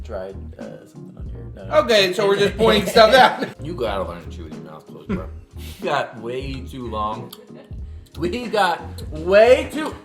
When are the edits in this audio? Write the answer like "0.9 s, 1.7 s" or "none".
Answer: 3.5 s, 5.8 s